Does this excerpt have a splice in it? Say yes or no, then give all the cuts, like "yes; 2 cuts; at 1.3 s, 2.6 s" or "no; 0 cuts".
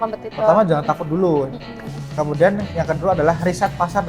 no; 0 cuts